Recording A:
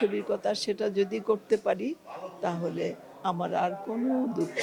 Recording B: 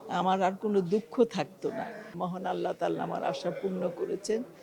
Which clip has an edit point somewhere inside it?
B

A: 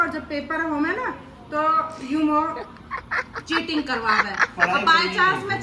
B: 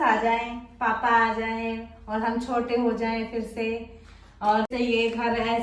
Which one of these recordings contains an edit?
B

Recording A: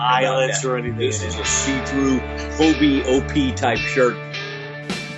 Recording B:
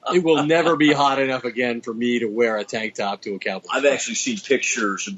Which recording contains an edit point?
A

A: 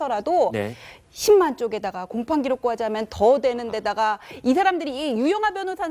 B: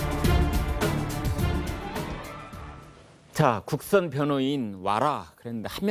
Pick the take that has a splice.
A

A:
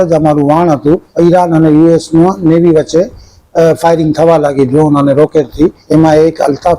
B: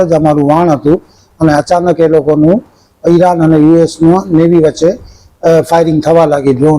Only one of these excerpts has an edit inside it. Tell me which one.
A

